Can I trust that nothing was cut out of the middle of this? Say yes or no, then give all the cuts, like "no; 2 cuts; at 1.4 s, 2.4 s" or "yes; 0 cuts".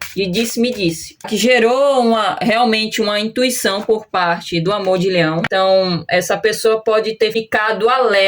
no; 3 cuts; at 1.3 s, 5.5 s, 7.4 s